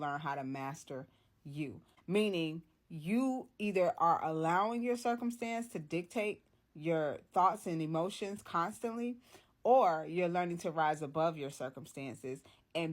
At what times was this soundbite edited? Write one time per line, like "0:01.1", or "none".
0:01.9